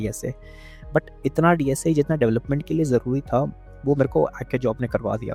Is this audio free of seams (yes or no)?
yes